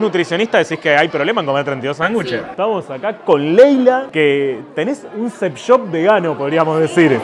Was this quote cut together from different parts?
no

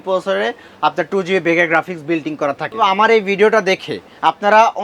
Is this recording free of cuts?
no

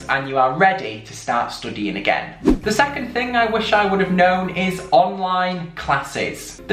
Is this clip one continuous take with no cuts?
yes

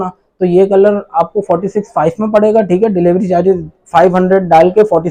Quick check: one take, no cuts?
yes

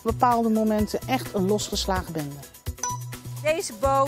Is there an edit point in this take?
yes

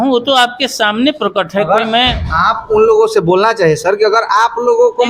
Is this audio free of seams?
yes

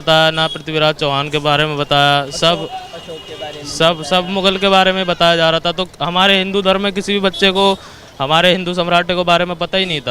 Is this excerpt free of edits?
yes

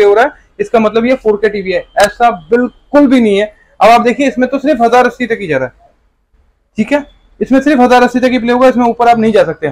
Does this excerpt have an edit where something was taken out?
no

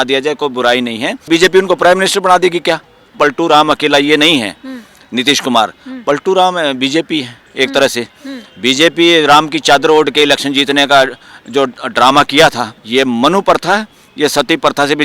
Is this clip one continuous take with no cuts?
no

